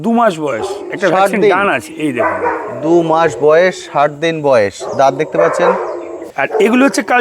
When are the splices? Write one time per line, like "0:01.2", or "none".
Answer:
none